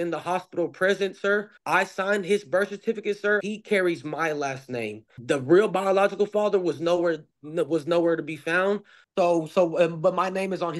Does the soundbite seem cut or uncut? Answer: cut